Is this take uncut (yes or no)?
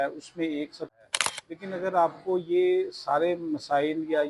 no